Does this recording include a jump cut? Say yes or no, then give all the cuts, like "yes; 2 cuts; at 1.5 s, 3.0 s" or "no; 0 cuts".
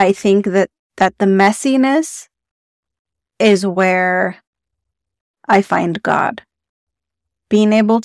no; 0 cuts